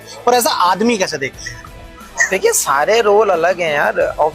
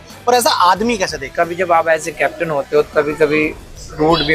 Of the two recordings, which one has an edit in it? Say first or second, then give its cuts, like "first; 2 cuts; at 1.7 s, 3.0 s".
second; 1 cut; at 1.2 s